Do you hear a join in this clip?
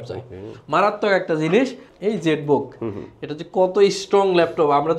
yes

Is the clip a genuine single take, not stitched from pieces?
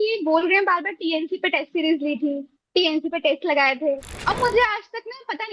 no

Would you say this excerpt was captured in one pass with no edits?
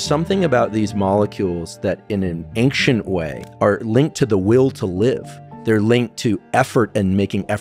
no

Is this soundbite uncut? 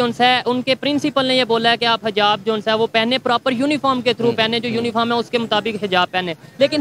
yes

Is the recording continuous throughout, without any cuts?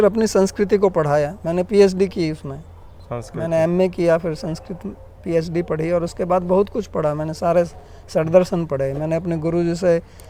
yes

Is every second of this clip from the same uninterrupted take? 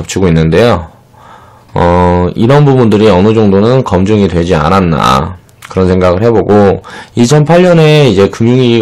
yes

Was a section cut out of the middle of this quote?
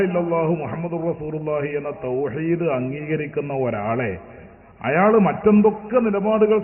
no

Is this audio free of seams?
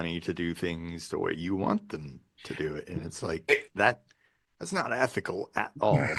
yes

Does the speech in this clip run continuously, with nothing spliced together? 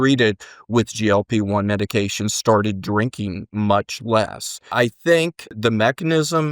no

